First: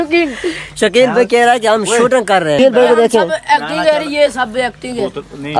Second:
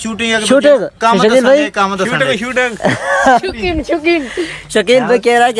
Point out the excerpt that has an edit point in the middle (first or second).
first